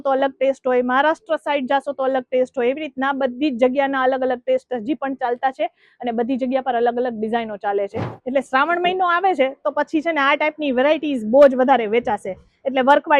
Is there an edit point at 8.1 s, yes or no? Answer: yes